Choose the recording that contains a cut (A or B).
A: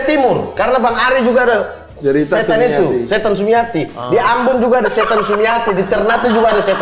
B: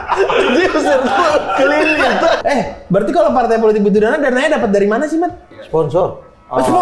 B